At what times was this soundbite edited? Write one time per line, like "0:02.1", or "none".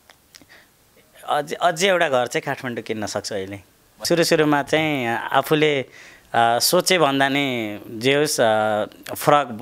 0:04.0